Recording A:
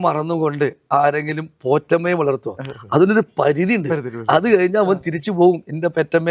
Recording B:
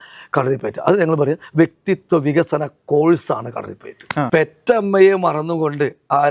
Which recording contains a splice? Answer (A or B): B